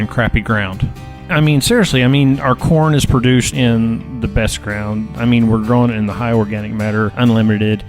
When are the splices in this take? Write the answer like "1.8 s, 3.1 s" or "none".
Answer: 1.2 s, 3.5 s, 7.1 s